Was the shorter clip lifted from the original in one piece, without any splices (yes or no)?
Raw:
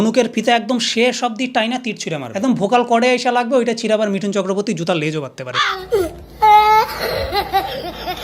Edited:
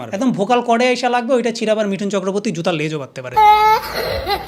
no